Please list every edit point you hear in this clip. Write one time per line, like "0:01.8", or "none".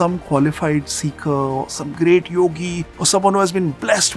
none